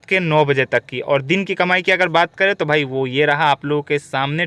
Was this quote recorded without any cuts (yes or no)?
yes